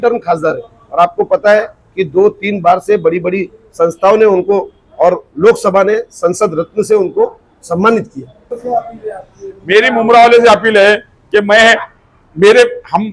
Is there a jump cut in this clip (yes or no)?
yes